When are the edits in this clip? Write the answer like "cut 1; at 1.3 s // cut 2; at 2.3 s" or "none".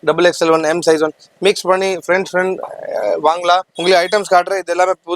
cut 1; at 3.7 s